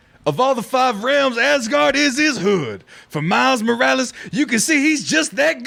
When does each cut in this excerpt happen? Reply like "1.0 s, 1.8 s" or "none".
none